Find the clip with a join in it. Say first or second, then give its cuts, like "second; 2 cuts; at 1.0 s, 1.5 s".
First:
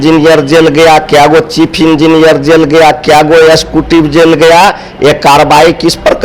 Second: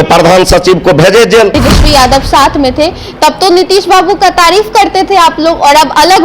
second; 1 cut; at 1.6 s